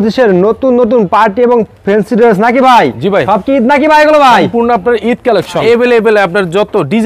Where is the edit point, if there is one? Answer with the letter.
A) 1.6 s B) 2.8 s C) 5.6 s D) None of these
C